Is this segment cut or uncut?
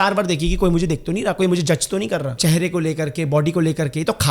cut